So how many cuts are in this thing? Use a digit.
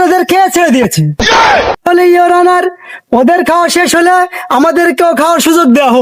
0